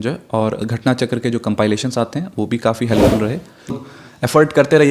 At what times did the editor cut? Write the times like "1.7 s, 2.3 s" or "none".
3.9 s